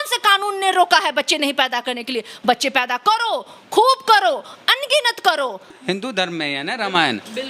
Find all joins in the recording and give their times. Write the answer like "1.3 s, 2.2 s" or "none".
5.7 s